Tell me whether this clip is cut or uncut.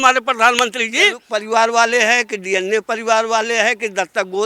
cut